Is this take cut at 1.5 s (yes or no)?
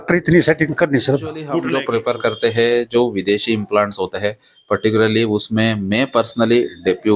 yes